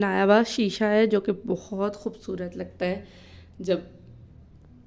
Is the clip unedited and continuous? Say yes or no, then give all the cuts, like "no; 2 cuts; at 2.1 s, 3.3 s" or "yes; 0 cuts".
yes; 0 cuts